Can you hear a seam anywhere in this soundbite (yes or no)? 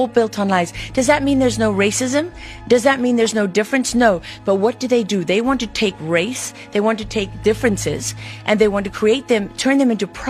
no